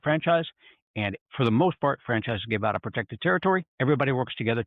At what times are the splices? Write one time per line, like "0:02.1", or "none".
0:01.2
0:03.7